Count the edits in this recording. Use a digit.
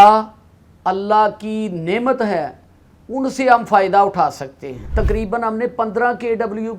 1